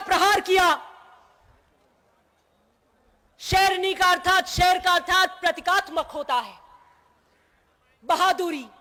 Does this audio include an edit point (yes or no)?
no